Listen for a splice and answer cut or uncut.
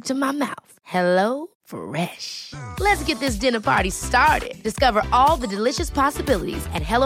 uncut